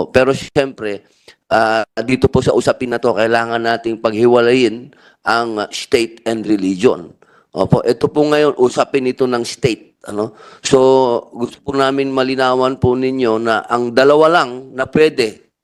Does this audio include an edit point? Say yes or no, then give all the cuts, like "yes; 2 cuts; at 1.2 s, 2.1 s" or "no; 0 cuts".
no; 0 cuts